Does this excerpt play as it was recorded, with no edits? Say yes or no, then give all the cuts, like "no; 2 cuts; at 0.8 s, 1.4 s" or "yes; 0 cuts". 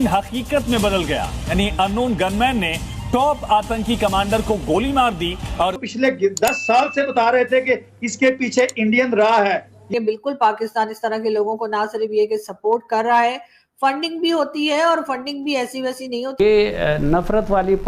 no; 3 cuts; at 5.8 s, 9.9 s, 16.4 s